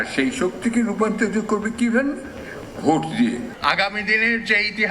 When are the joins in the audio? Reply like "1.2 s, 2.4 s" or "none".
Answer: 3.5 s